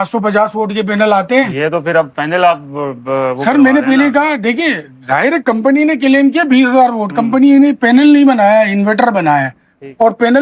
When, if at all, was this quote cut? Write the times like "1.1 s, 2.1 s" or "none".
none